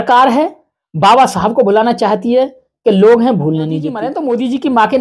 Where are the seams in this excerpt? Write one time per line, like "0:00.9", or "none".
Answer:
0:04.1